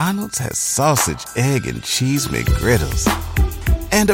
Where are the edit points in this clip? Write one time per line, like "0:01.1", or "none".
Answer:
none